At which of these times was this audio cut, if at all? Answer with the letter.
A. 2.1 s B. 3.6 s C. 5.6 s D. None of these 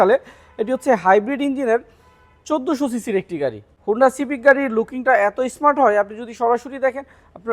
D